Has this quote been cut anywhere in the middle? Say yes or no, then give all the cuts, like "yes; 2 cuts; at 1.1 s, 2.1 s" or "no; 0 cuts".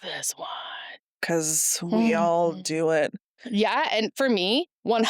yes; 1 cut; at 1.2 s